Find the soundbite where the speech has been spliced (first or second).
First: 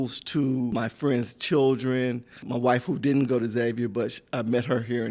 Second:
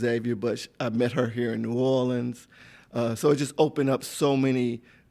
first